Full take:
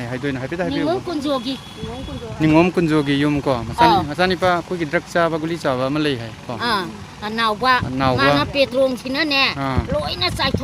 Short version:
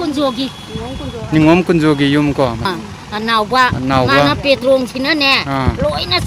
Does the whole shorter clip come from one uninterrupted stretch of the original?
no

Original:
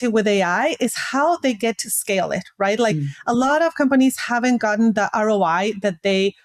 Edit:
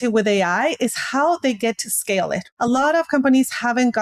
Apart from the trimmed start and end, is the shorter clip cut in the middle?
yes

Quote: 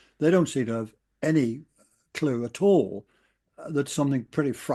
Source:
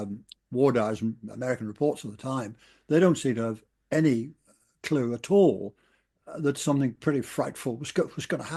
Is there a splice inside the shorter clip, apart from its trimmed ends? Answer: no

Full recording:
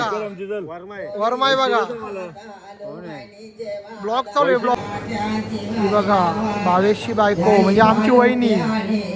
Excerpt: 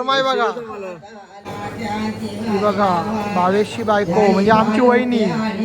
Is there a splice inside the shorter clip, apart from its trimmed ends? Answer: yes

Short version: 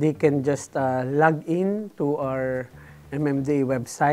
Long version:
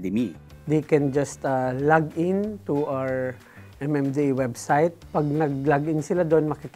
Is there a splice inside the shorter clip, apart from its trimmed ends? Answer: no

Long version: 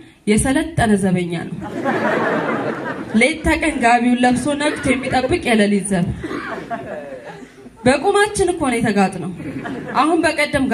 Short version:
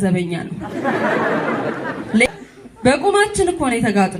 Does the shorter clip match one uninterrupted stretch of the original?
no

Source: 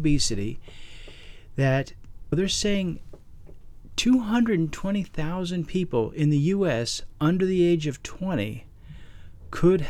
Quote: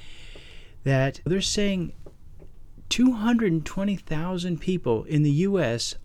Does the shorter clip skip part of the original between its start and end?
yes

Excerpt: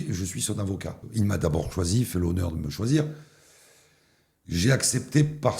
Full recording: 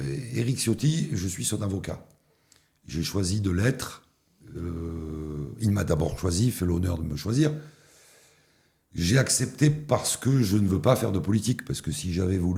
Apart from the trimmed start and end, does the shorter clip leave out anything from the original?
yes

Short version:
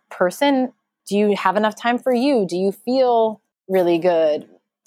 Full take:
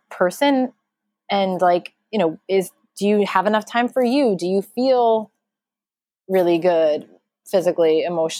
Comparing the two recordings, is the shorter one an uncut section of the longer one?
no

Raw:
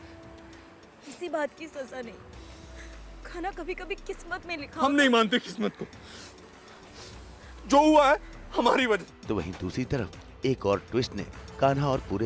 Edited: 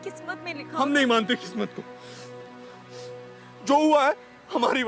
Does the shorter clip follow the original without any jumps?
yes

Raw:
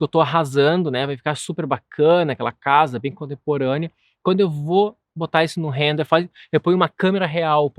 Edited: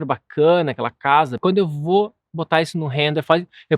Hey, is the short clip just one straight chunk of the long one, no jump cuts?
no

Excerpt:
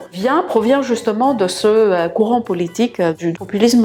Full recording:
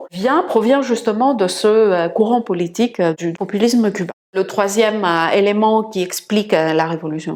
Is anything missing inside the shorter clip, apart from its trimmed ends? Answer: no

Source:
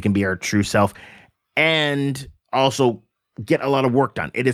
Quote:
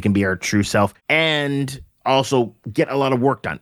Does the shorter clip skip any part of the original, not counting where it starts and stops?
yes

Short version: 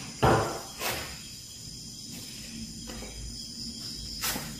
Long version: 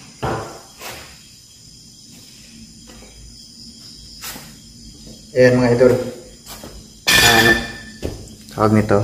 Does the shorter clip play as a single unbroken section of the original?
yes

